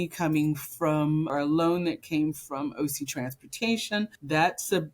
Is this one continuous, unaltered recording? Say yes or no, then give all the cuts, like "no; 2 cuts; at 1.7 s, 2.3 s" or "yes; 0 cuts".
no; 1 cut; at 1.3 s